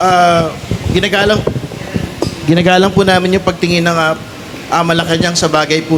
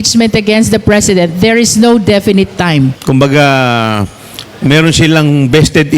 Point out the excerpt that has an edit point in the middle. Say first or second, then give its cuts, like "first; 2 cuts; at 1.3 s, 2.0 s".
second; 1 cut; at 3.0 s